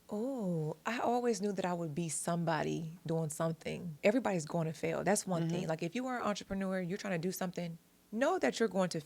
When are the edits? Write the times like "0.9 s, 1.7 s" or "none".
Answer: 4.0 s